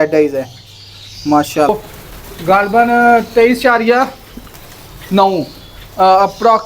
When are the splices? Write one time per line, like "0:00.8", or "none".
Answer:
0:01.7